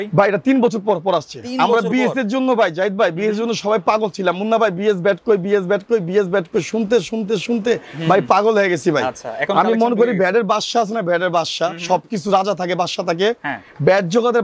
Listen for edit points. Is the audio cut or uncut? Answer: uncut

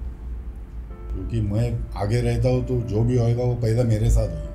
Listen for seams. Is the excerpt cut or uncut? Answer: cut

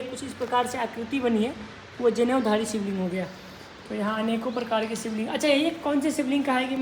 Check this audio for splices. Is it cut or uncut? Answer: uncut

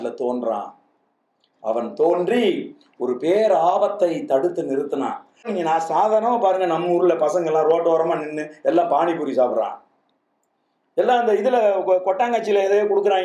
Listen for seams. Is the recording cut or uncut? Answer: cut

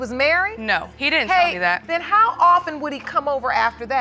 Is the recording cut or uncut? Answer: cut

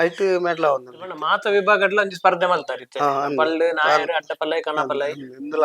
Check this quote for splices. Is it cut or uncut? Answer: cut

